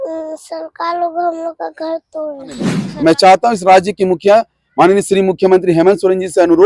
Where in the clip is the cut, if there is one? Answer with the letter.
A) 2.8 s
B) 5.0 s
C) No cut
A